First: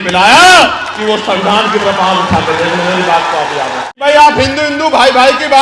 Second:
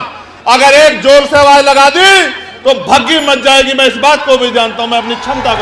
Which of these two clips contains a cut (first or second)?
first